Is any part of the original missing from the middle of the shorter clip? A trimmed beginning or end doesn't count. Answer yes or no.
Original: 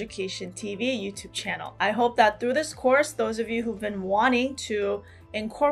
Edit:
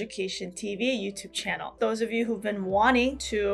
yes